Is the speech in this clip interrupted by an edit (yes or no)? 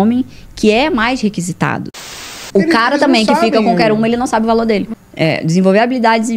yes